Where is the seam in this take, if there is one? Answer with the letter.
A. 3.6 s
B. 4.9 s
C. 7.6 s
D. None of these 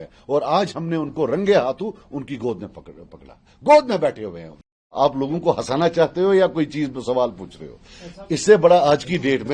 B